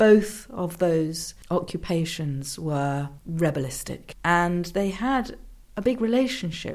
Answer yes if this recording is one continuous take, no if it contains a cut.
no